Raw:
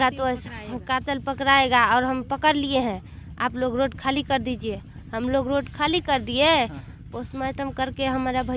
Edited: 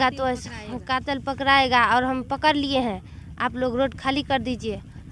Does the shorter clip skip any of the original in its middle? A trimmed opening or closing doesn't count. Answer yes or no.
no